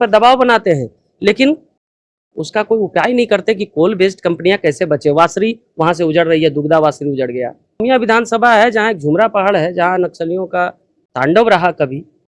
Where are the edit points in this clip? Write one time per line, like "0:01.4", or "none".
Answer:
0:07.8

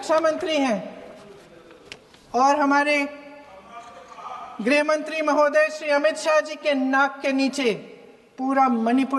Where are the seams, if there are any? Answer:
none

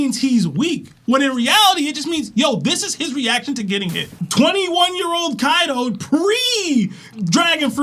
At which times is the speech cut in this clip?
0:04.1

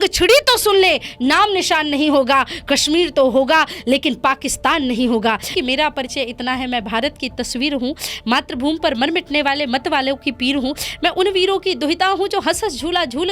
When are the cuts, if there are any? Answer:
0:05.5

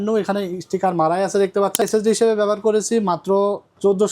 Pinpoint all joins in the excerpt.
0:01.8

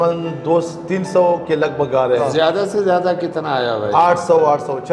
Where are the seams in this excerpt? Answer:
0:02.3

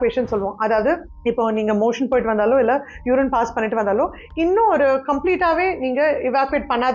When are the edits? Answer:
none

